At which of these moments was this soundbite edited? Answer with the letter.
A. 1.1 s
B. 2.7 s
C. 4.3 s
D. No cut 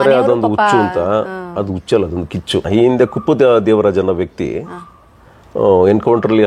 B